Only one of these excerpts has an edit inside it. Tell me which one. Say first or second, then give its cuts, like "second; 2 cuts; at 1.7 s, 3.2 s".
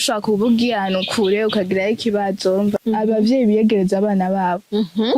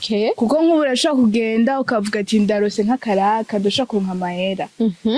first; 1 cut; at 2.8 s